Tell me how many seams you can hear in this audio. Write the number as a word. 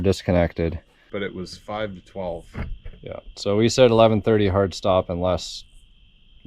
one